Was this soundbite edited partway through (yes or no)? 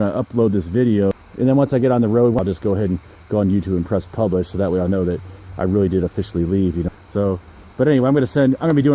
yes